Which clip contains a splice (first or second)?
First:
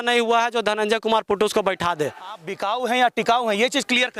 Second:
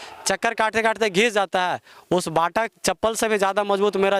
first